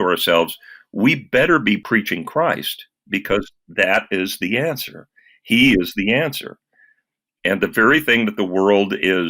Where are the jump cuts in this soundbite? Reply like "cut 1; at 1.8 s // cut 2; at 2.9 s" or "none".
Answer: cut 1; at 1.8 s